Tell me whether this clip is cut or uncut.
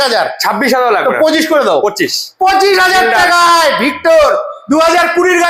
uncut